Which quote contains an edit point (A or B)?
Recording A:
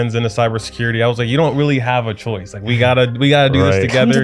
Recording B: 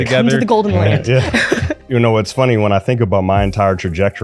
B